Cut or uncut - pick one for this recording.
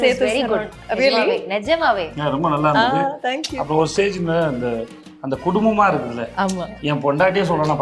uncut